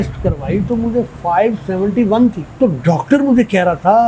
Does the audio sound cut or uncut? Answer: cut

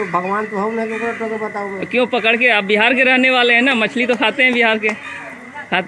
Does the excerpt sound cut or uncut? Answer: uncut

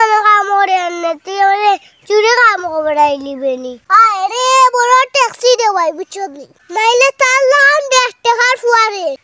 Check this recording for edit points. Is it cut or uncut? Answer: cut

